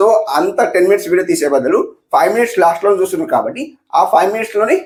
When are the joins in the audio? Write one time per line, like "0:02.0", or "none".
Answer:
none